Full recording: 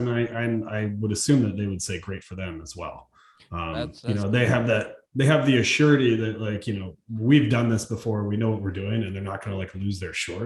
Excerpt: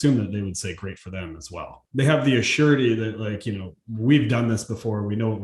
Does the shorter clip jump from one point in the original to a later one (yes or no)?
yes